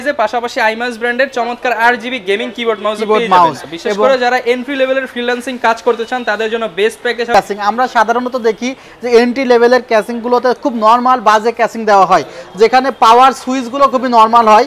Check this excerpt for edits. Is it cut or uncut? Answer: cut